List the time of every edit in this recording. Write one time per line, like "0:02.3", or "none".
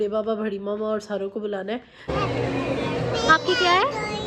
0:02.1

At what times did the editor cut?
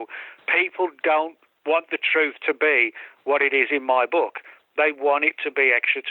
none

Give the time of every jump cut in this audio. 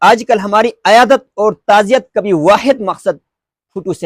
none

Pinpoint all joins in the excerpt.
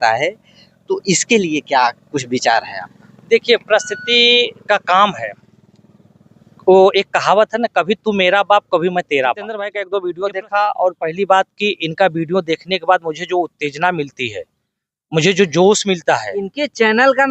0:09.8

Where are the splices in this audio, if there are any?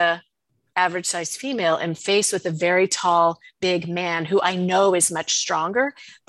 none

